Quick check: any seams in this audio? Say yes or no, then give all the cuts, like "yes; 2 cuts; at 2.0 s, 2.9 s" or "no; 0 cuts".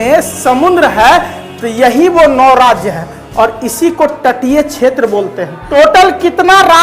yes; 1 cut; at 5.5 s